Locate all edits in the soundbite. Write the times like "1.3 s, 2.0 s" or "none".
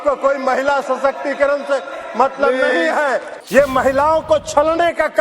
3.3 s